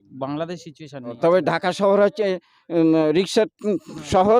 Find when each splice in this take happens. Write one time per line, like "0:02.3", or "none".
0:01.2